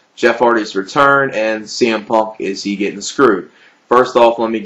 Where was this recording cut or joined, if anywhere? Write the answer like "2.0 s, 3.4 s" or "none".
none